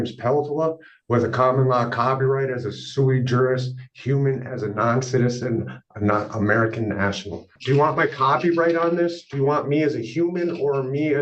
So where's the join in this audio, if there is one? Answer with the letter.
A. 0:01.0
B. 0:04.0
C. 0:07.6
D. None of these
C